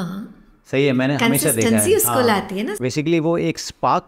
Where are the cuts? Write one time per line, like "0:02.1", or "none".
none